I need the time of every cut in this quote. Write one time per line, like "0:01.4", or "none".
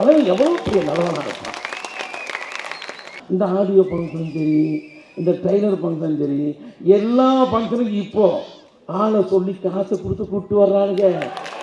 0:03.2